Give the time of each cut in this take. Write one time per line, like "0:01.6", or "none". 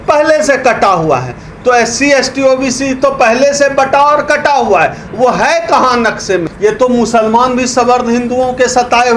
0:06.5